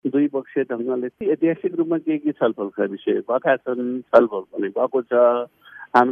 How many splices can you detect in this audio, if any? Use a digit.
1